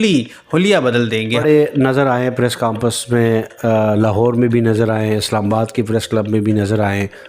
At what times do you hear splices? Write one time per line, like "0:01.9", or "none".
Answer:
0:01.4